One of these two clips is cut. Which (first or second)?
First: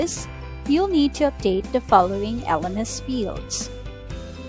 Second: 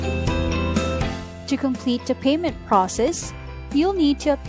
second